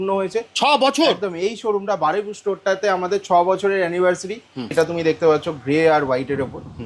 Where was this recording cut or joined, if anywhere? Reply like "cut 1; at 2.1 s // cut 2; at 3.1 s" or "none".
cut 1; at 4.7 s